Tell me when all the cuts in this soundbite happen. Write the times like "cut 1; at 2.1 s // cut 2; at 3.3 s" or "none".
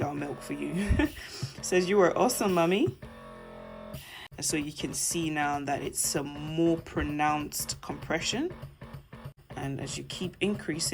cut 1; at 4.3 s // cut 2; at 9.4 s